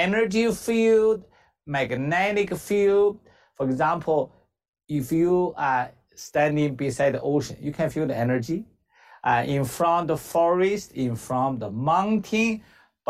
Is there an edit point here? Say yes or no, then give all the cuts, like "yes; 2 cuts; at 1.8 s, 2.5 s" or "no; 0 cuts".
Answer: no; 0 cuts